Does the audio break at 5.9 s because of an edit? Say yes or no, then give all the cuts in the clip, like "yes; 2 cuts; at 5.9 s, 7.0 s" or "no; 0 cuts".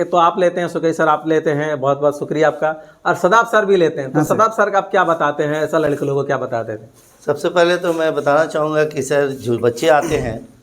no; 0 cuts